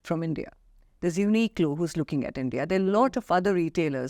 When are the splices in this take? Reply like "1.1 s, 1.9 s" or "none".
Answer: none